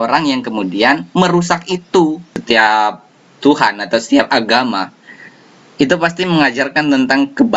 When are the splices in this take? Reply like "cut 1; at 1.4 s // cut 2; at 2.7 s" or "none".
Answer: cut 1; at 2.3 s